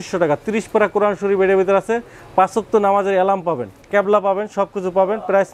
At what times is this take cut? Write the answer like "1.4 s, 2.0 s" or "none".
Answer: none